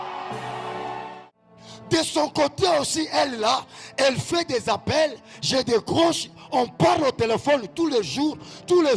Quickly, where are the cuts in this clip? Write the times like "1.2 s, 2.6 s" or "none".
1.1 s